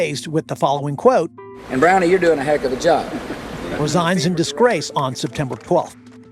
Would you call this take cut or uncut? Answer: uncut